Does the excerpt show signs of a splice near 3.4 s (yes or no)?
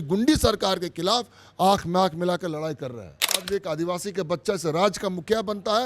yes